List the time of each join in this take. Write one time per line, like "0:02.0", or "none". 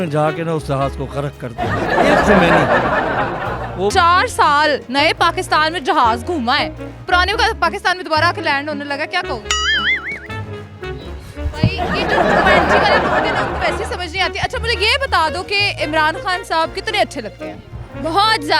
0:03.9